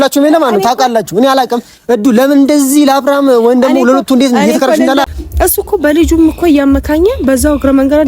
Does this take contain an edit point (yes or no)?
yes